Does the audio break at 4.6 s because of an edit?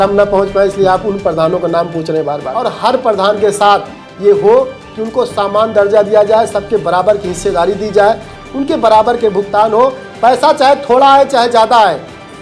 no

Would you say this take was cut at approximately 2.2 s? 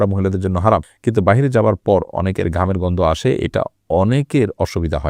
no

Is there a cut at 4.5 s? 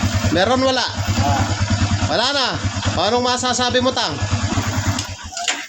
yes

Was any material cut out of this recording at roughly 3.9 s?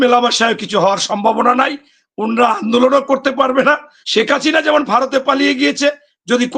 yes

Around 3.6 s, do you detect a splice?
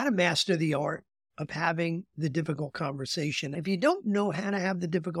yes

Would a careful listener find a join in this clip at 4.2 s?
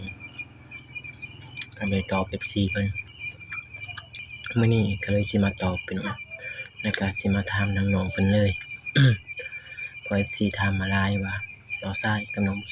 yes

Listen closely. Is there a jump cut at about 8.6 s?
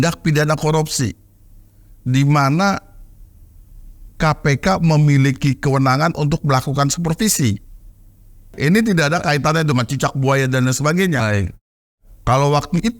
yes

